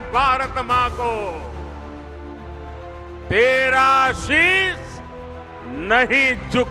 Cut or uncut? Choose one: cut